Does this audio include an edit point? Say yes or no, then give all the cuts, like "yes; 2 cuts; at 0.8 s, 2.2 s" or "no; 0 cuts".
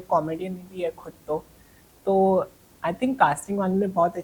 no; 0 cuts